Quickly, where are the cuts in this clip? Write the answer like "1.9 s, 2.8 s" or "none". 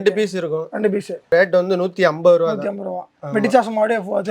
1.3 s